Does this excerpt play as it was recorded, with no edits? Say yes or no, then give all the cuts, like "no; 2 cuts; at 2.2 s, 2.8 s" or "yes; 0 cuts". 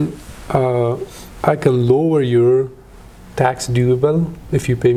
yes; 0 cuts